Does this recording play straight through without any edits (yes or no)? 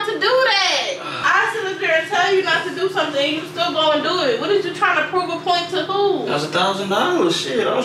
no